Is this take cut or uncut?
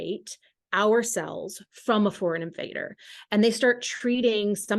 uncut